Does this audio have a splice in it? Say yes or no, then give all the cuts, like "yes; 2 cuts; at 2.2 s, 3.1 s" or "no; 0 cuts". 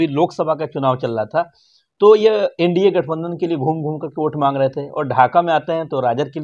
no; 0 cuts